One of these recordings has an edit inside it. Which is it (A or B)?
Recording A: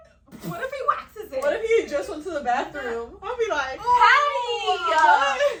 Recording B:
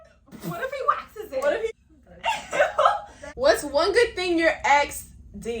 B